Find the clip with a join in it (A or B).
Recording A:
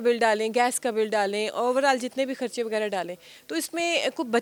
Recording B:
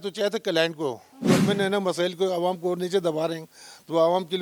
B